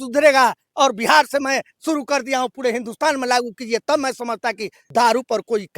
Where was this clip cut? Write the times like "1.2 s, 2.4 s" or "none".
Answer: 4.7 s